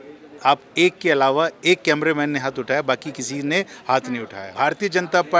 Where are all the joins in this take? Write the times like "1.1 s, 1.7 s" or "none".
4.4 s